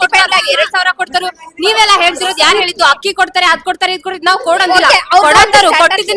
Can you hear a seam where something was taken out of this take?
no; 0 cuts

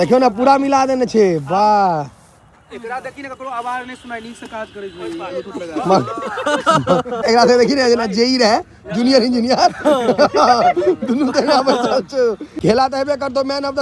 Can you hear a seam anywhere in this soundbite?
yes; 2 cuts; at 7.2 s, 12.5 s

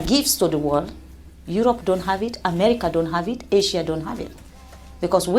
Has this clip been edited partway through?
no; 0 cuts

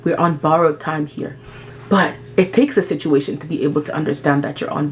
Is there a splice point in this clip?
no; 0 cuts

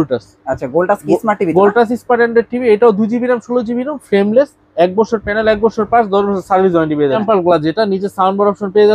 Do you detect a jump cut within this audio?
yes; 1 cut; at 7.2 s

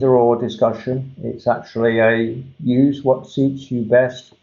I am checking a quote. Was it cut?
no; 0 cuts

